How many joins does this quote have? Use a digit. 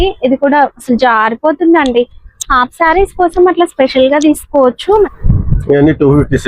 1